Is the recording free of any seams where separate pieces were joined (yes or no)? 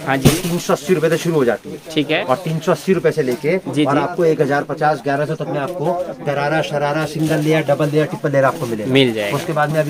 yes